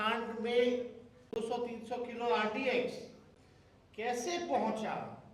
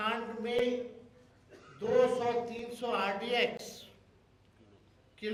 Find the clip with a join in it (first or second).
first